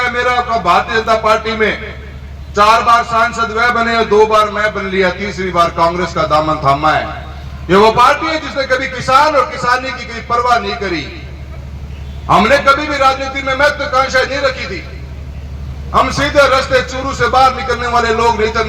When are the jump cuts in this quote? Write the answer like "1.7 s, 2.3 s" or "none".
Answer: none